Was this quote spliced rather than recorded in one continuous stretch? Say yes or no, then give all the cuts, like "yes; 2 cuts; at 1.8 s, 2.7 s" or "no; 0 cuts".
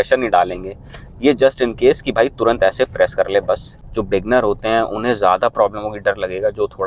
yes; 1 cut; at 3.8 s